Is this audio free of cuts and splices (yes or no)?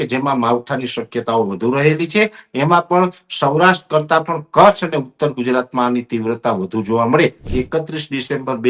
no